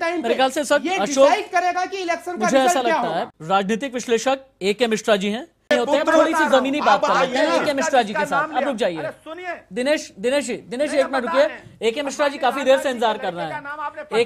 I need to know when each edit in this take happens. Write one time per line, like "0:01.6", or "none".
0:03.4